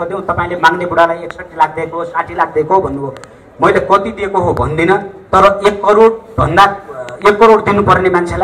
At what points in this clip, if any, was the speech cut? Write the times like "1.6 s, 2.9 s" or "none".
none